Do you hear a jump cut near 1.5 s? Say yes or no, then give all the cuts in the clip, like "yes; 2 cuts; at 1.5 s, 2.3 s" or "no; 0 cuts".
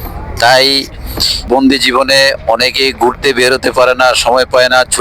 yes; 1 cut; at 1.5 s